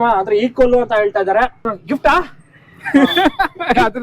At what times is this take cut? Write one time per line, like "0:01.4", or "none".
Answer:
0:01.7